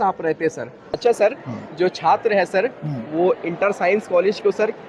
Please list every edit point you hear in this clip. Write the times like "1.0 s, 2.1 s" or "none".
1.0 s